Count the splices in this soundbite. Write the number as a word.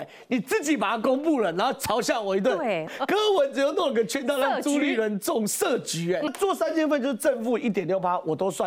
two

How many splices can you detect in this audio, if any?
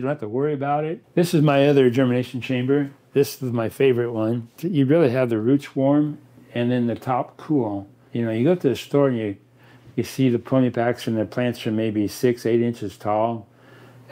three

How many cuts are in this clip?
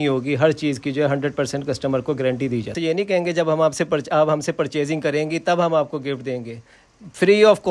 one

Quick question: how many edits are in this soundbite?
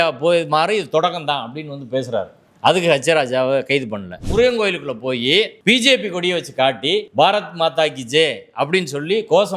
two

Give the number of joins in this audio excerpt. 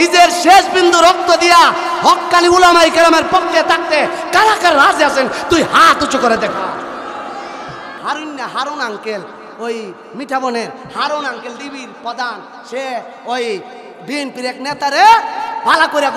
one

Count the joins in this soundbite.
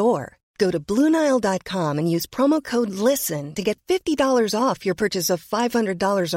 zero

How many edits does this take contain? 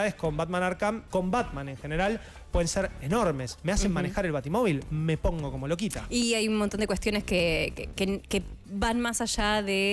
one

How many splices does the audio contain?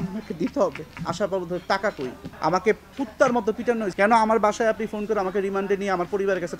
three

